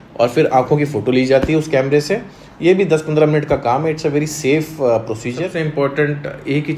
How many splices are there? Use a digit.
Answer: 1